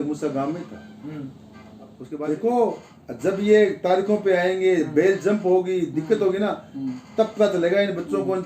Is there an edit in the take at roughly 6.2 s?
no; 1 cut; at 2.0 s

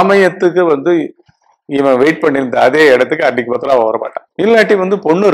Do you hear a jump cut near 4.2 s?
yes; 1 cut; at 4.2 s

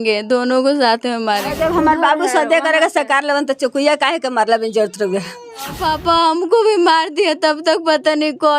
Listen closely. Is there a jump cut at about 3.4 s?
no; 2 cuts; at 1.5 s, 5.8 s

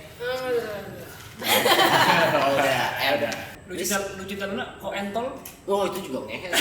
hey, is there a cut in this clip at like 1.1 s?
no; 1 cut; at 3.5 s

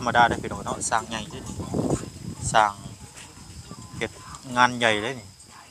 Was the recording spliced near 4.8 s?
no; 0 cuts

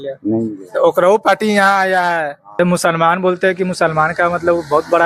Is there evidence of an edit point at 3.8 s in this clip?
no; 1 cut; at 2.6 s

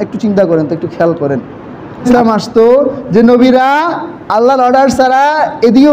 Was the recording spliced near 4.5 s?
no; 1 cut; at 2.1 s

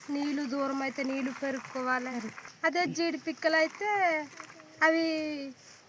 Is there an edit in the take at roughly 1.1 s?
no; 1 cut; at 2.4 s

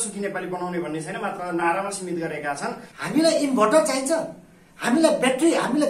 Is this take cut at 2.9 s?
yes; 1 cut; at 2.9 s

